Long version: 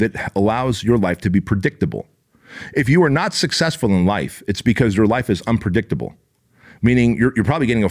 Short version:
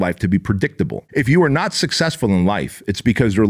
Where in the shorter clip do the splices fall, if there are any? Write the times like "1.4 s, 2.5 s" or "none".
1.0 s